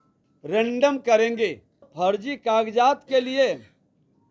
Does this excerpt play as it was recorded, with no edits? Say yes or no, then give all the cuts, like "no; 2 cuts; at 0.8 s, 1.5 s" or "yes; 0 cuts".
no; 1 cut; at 1.9 s